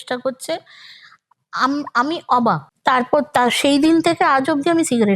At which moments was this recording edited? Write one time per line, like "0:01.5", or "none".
0:02.7